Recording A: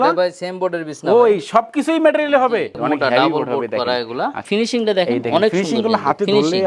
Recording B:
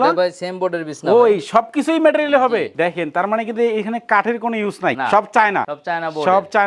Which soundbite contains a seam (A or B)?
A